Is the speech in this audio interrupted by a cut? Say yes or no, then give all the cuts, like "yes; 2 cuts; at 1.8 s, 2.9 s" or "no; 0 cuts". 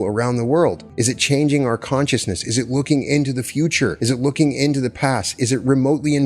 yes; 2 cuts; at 0.9 s, 4.0 s